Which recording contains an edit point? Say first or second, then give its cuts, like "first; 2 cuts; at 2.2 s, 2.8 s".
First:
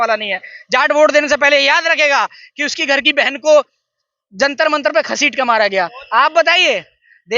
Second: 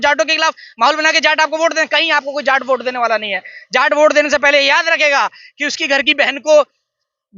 first; 1 cut; at 6.0 s